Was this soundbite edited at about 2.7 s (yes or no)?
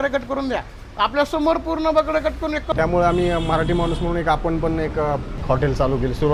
yes